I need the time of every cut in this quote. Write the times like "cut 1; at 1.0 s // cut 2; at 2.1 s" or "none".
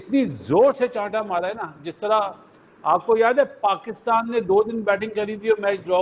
none